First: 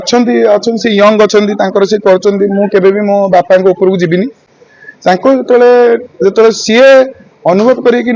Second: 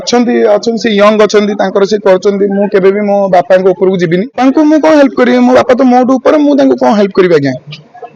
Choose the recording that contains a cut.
second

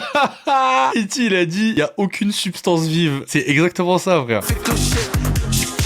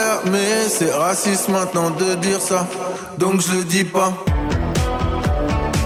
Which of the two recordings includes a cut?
first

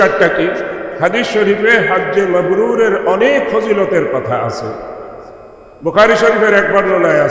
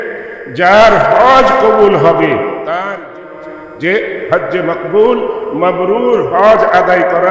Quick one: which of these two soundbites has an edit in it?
second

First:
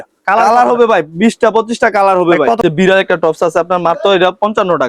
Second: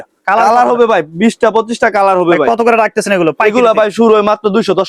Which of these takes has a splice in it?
first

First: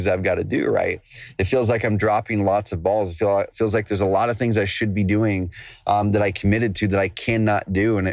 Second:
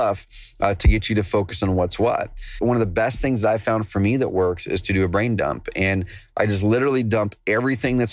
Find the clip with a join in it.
second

